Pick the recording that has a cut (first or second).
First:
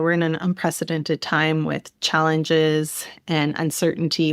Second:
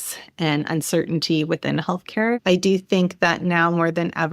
second